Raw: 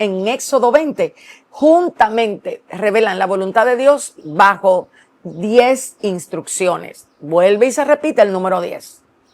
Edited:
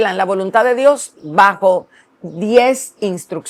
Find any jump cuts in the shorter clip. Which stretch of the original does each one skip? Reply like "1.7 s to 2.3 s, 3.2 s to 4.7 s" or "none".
none